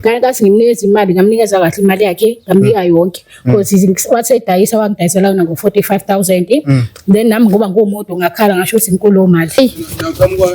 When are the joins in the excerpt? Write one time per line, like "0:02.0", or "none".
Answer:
0:09.6